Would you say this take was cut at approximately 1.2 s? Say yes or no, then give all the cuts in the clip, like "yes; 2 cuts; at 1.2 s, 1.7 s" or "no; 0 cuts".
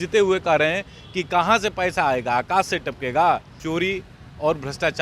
no; 1 cut; at 3.5 s